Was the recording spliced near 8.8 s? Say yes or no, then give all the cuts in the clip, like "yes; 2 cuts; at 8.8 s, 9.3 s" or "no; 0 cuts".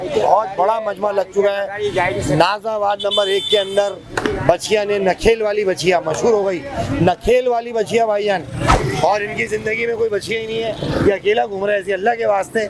yes; 1 cut; at 8.8 s